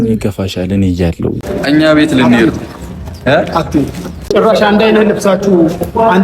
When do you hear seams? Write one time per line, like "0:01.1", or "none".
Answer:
0:01.4
0:04.2